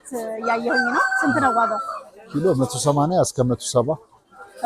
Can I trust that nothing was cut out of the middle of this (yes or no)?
yes